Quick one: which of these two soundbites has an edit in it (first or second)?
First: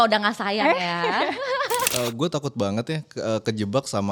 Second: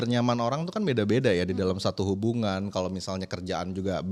first